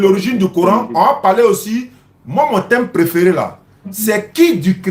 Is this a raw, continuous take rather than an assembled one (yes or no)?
yes